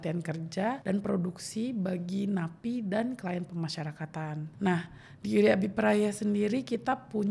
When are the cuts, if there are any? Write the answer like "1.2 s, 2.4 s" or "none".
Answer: none